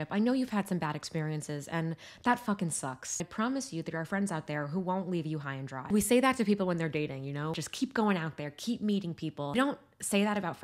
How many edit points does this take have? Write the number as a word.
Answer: four